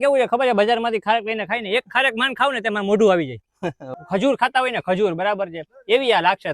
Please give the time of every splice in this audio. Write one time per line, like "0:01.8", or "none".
0:03.9